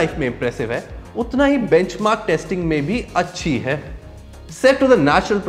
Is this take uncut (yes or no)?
yes